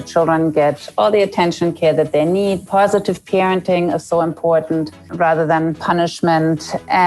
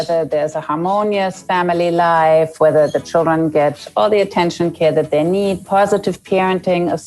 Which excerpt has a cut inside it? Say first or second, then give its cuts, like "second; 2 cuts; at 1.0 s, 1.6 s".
first; 1 cut; at 5.0 s